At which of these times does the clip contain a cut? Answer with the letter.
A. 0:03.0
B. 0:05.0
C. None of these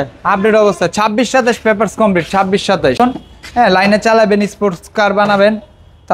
A